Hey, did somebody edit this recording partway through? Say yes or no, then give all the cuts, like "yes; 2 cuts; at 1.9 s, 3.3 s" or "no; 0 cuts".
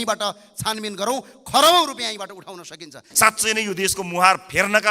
yes; 1 cut; at 3.0 s